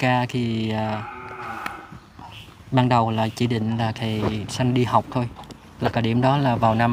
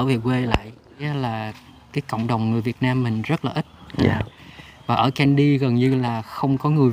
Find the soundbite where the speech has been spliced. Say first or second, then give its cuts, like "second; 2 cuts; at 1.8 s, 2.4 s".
second; 1 cut; at 1.0 s